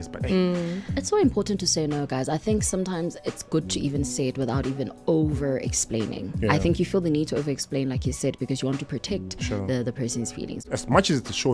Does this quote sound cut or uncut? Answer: cut